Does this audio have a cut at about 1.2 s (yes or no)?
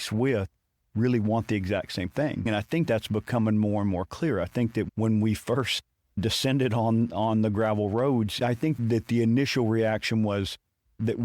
no